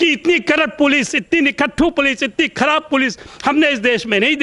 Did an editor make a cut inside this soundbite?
no; 0 cuts

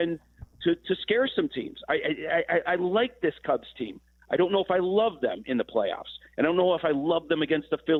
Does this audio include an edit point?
no; 0 cuts

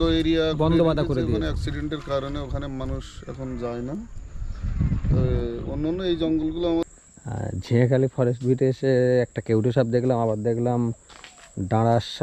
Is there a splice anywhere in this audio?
yes; 1 cut; at 6.9 s

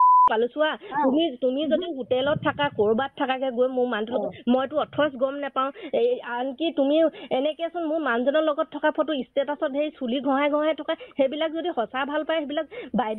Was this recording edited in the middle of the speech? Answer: yes; 1 cut; at 8.0 s

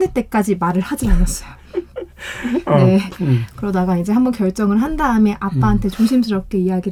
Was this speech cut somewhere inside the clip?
no; 0 cuts

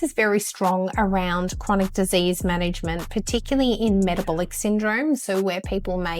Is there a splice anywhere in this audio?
no; 0 cuts

